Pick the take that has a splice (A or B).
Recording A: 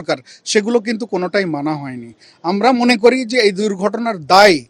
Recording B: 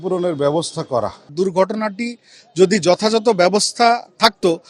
B